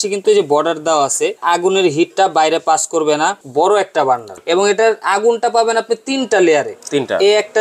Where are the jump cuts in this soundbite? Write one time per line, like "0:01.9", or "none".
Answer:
0:01.4
0:03.4
0:04.3